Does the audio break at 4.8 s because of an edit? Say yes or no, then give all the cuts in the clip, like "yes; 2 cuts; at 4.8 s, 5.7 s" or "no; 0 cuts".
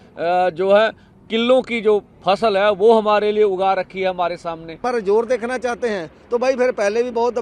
yes; 1 cut; at 4.8 s